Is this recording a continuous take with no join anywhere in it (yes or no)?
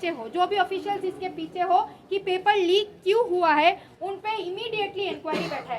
yes